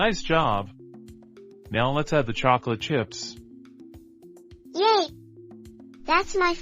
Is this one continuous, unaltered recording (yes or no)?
no